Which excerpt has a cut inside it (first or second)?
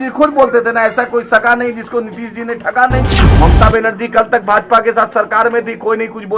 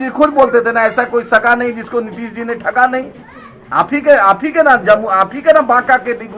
first